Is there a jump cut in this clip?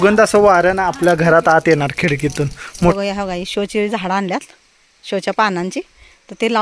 yes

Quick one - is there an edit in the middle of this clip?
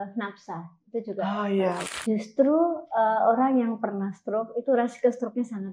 yes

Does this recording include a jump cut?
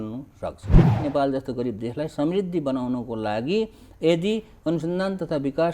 yes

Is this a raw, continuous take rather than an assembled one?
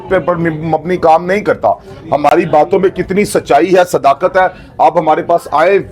yes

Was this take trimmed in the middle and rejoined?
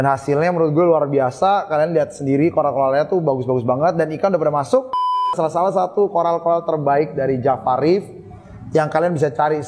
yes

